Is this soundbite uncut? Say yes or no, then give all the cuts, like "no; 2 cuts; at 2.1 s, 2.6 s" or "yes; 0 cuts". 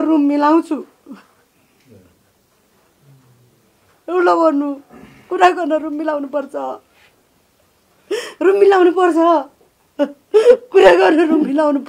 yes; 0 cuts